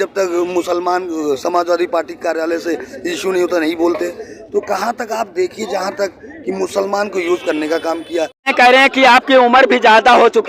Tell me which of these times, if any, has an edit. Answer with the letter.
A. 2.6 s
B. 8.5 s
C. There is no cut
B